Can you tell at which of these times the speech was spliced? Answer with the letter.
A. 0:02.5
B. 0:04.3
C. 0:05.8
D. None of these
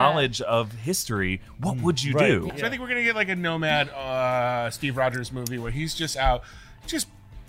A